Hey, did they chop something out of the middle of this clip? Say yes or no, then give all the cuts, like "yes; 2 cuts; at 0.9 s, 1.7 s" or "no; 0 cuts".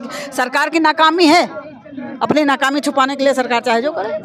no; 0 cuts